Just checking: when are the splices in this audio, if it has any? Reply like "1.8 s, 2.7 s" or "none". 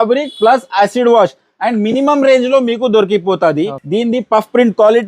3.8 s